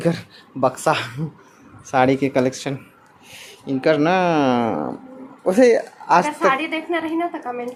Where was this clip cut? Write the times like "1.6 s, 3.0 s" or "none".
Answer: none